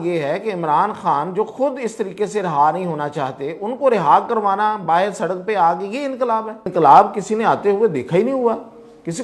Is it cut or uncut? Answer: cut